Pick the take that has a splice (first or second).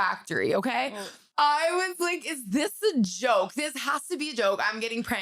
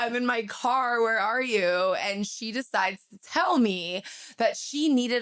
first